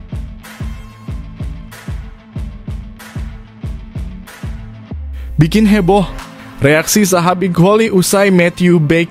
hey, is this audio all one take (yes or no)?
yes